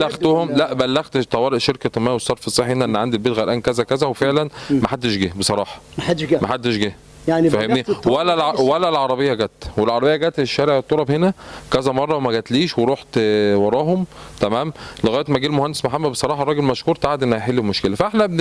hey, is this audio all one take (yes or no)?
yes